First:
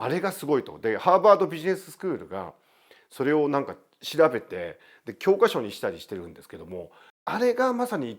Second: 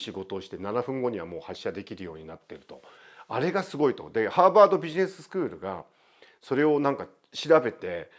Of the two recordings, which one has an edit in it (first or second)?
first